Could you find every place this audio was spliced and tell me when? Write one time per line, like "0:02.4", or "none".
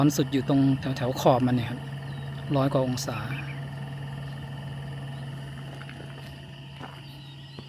none

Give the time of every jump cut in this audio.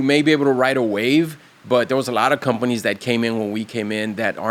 none

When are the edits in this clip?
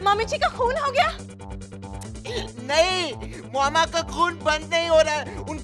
none

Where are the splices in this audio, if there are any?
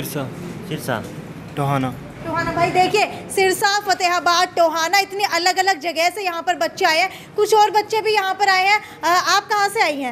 none

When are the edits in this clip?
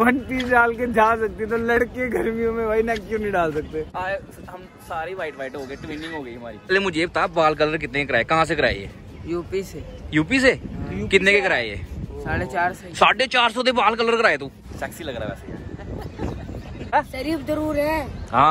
0:03.9
0:06.7
0:14.6
0:17.2

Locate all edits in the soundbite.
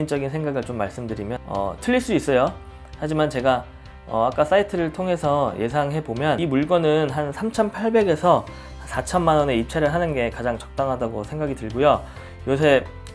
0:01.4

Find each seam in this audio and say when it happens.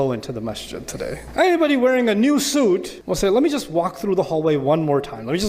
0:01.2
0:03.0

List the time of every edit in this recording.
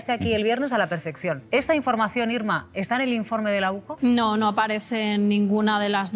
0:01.4
0:04.1

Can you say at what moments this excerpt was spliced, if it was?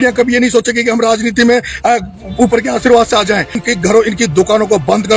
0:03.6

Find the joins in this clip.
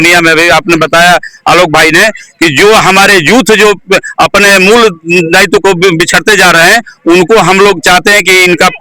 0:06.5

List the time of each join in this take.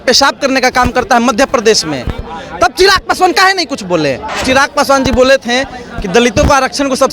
0:04.4

